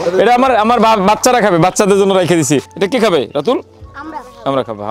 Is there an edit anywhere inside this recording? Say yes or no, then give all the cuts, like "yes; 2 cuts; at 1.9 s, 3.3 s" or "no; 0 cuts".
no; 0 cuts